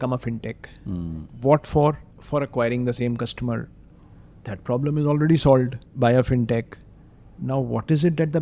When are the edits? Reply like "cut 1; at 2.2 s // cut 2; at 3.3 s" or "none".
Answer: cut 1; at 1.2 s // cut 2; at 2.1 s // cut 3; at 5.8 s